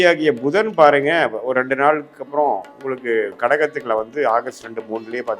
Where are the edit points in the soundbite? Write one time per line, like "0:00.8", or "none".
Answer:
none